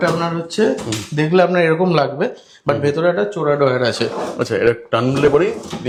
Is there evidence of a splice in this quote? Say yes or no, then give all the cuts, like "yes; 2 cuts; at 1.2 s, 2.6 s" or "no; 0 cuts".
no; 0 cuts